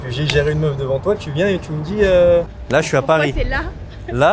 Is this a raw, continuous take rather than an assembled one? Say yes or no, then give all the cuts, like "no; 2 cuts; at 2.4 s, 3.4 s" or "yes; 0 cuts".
no; 1 cut; at 2.6 s